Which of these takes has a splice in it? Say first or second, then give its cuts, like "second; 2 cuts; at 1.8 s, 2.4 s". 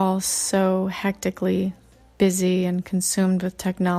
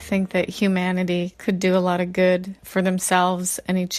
second; 2 cuts; at 1.3 s, 2.6 s